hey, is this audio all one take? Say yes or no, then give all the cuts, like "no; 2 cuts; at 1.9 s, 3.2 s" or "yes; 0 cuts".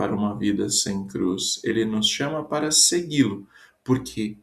no; 1 cut; at 3.2 s